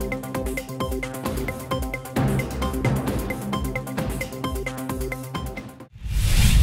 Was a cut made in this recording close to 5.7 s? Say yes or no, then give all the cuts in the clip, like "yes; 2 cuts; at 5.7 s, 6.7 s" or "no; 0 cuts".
yes; 1 cut; at 5.7 s